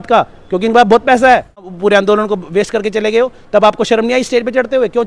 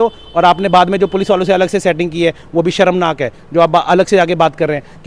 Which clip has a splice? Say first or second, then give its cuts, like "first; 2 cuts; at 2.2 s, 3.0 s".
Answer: first; 1 cut; at 1.7 s